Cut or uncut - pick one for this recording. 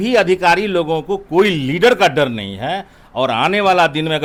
uncut